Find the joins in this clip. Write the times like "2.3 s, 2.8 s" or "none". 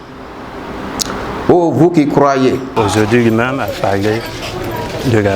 2.7 s

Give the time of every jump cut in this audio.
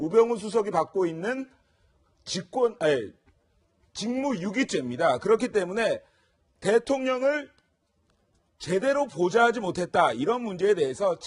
none

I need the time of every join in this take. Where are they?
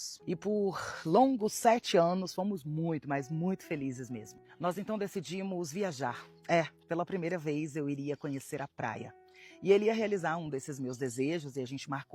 none

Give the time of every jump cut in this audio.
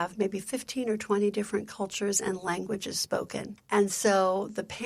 3.5 s

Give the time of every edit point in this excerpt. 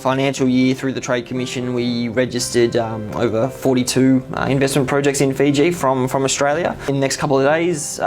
6.8 s

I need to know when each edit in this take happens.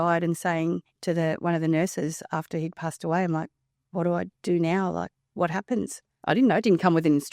0.9 s, 6.0 s

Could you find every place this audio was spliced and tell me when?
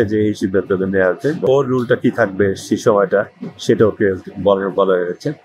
1.4 s

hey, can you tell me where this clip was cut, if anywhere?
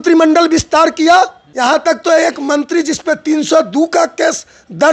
1.4 s

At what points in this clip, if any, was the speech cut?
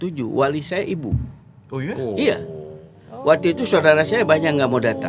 none

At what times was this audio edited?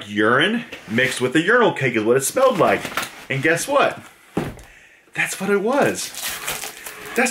none

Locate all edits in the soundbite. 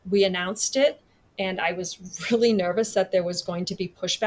none

